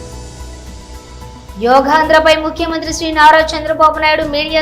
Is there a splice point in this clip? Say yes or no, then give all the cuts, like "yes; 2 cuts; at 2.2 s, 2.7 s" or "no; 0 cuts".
no; 0 cuts